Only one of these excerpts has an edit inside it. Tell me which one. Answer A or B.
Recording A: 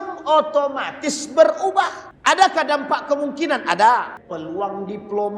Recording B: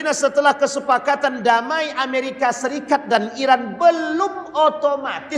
A